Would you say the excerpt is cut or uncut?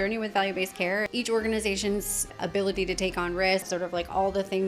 cut